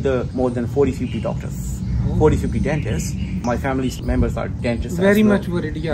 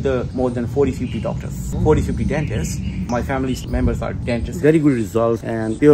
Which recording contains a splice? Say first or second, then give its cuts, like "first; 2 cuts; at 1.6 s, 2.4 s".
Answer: second; 2 cuts; at 1.6 s, 4.6 s